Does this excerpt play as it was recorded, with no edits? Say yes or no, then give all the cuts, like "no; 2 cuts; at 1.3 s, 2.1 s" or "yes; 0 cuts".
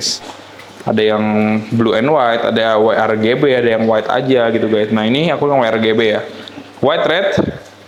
yes; 0 cuts